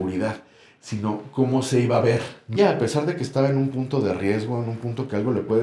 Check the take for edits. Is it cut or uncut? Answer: cut